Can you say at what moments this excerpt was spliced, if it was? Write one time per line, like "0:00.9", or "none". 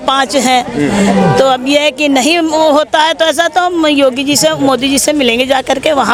none